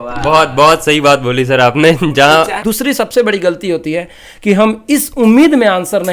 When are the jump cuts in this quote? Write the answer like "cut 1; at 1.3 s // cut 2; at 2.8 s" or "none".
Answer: cut 1; at 2.5 s